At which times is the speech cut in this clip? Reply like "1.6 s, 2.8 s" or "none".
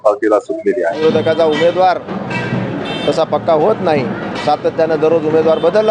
1.0 s